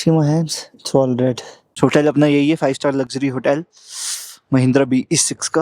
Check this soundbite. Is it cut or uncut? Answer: cut